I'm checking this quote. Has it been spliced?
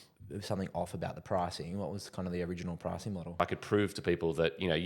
yes; 1 cut; at 3.4 s

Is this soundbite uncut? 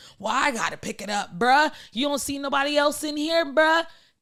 yes; 0 cuts

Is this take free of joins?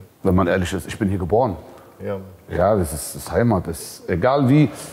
yes; 0 cuts

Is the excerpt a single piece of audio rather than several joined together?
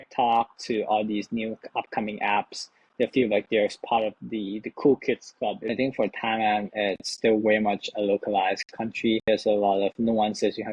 no; 2 cuts; at 5.6 s, 9.3 s

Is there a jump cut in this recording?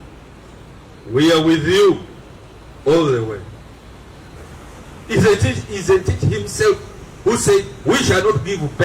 yes; 1 cut; at 4.4 s

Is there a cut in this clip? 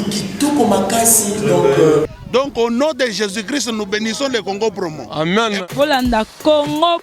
yes; 1 cut; at 2.2 s

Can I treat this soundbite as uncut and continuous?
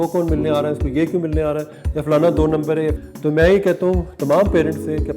no; 1 cut; at 3.0 s

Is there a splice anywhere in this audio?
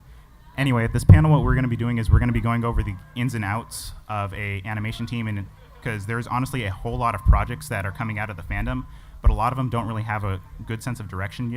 yes; 1 cut; at 5.6 s

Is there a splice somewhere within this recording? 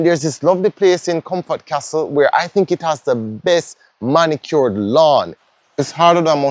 yes; 1 cut; at 5.4 s

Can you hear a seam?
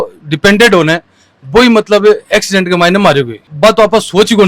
no; 0 cuts

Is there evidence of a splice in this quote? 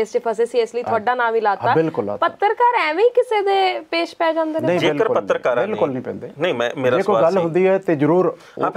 no; 0 cuts

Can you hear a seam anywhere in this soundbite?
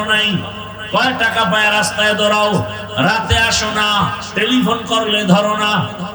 no; 0 cuts

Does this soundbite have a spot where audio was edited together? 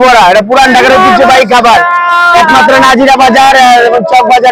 no; 0 cuts

